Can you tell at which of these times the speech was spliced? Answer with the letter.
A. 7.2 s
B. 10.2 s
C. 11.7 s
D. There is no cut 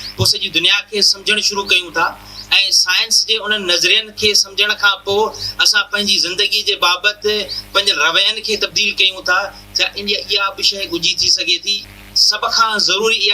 C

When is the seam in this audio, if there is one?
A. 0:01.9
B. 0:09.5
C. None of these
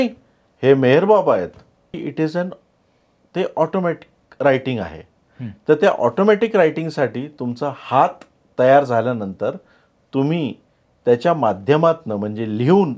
A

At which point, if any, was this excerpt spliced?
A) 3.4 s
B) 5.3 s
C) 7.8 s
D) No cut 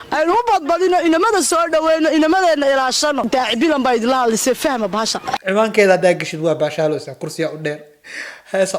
B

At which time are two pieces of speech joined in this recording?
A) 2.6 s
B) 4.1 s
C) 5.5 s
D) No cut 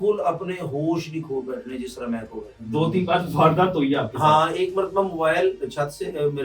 A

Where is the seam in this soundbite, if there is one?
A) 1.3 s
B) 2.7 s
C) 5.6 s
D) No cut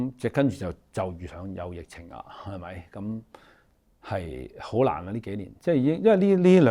D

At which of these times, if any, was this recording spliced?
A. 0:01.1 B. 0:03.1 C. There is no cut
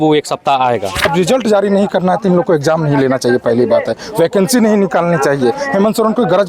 A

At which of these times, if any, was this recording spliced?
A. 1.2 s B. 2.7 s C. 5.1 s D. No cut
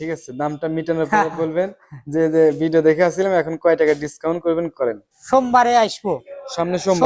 C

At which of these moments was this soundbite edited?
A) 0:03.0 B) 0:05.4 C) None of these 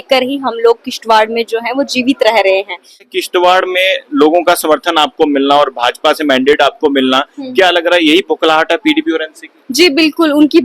A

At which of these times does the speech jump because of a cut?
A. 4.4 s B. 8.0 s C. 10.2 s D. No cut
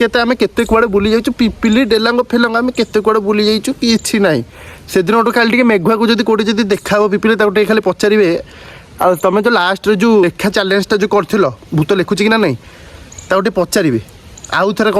C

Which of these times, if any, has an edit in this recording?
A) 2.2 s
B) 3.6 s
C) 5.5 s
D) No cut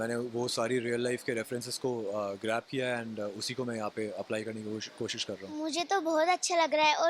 C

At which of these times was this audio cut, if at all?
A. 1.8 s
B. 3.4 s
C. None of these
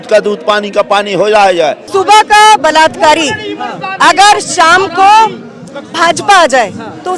A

